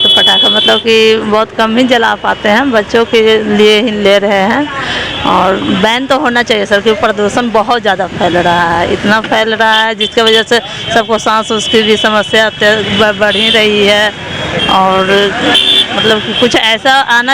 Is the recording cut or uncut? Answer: uncut